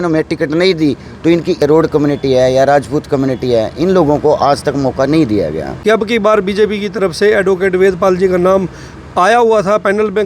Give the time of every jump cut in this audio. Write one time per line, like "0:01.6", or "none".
0:01.6
0:05.7